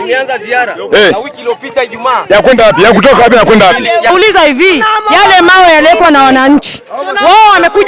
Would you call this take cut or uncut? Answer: cut